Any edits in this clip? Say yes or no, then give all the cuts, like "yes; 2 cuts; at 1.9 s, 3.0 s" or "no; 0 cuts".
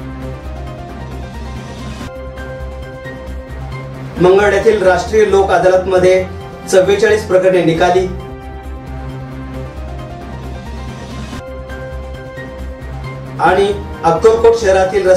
yes; 1 cut; at 1.2 s